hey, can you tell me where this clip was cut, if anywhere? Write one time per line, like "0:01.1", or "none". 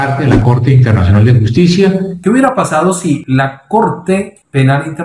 0:02.1
0:03.2